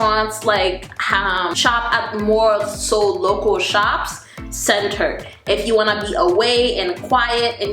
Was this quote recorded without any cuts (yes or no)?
no